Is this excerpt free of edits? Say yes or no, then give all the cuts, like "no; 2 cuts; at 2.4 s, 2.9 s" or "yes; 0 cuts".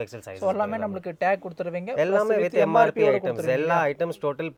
yes; 0 cuts